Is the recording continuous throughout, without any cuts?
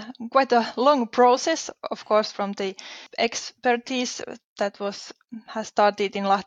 no; 1 cut; at 3.0 s

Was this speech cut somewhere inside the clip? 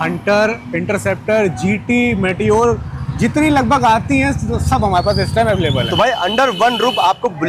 no; 0 cuts

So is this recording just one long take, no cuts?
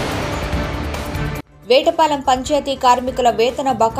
no; 1 cut; at 1.5 s

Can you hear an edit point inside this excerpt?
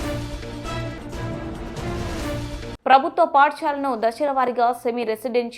yes; 2 cuts; at 1.7 s, 2.7 s

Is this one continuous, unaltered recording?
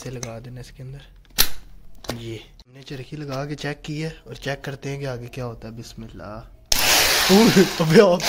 no; 1 cut; at 2.5 s

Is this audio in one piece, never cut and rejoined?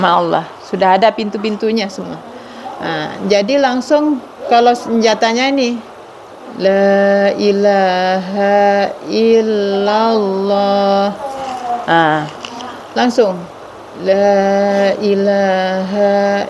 yes; 0 cuts

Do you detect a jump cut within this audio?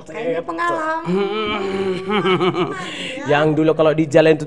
no; 0 cuts

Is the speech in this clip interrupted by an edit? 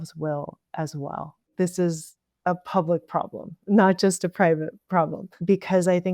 yes; 1 cut; at 1.5 s

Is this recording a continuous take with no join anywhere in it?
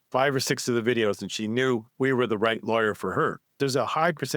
no; 2 cuts; at 1.9 s, 3.5 s

